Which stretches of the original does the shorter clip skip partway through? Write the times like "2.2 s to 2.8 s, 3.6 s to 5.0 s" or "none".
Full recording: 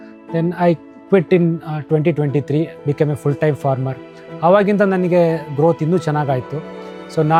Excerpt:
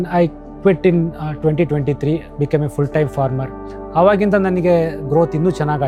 none